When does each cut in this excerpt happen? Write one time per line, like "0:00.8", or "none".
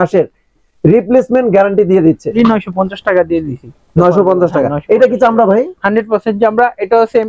0:02.3